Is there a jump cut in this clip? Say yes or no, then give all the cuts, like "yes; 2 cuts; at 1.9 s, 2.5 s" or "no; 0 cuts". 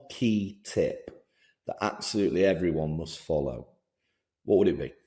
no; 0 cuts